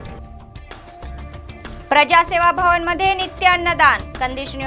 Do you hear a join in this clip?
yes; 1 cut; at 1.7 s

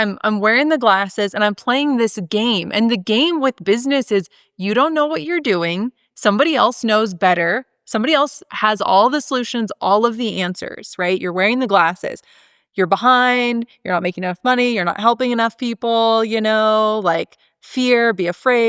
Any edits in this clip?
no; 0 cuts

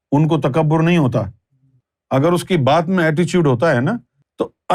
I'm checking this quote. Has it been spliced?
yes; 1 cut; at 1.9 s

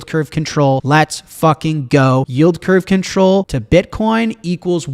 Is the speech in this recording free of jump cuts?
no; 3 cuts; at 0.8 s, 2.3 s, 3.6 s

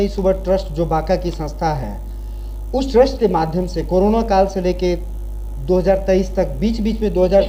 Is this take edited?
no; 0 cuts

